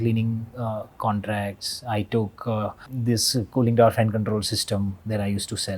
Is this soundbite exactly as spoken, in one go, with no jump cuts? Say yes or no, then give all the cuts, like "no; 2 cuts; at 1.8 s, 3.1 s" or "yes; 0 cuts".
no; 1 cut; at 2.9 s